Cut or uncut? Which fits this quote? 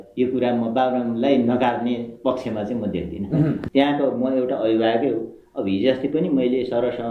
cut